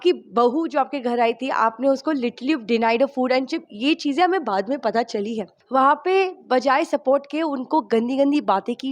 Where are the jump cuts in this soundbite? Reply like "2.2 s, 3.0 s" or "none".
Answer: 5.5 s